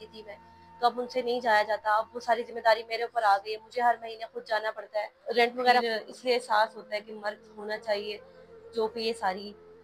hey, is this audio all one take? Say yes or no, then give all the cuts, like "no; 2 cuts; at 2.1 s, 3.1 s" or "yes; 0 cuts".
no; 1 cut; at 5.8 s